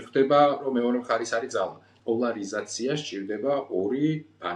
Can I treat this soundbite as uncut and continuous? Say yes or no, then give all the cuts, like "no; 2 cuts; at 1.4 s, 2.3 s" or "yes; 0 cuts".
no; 1 cut; at 1.9 s